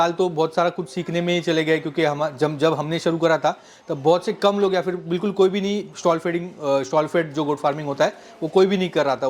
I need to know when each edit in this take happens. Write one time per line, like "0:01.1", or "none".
none